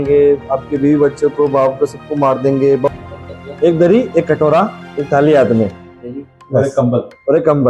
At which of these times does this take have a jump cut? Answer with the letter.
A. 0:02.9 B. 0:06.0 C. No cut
A